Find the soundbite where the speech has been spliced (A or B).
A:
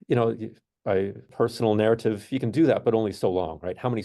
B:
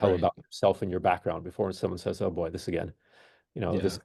A